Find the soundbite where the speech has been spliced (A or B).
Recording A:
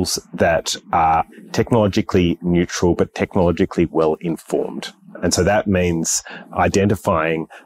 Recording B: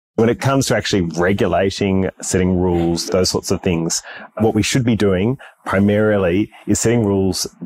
A